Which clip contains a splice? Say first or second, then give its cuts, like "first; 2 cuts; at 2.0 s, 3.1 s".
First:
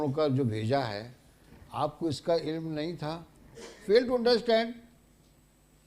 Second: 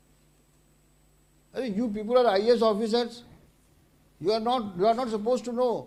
first; 1 cut; at 3.8 s